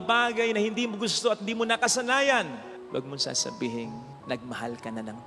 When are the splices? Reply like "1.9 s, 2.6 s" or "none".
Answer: none